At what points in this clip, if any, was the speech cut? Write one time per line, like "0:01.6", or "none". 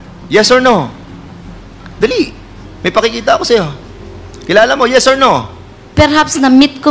none